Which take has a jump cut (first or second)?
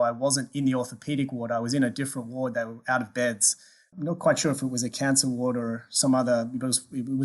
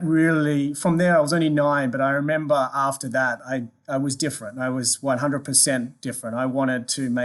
first